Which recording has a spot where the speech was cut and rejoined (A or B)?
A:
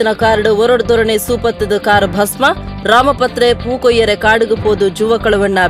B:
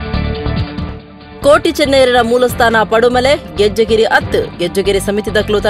B